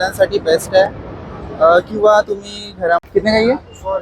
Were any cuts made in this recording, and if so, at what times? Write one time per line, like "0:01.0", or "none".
0:03.1